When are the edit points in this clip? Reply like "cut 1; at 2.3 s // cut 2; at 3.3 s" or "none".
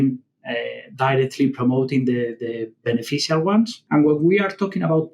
cut 1; at 3.8 s